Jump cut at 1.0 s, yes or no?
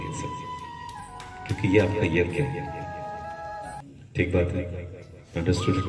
no